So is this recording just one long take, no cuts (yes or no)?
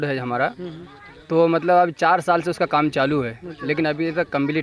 yes